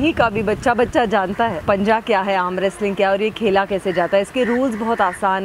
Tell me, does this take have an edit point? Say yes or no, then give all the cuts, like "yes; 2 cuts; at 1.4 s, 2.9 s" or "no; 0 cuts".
yes; 1 cut; at 1.6 s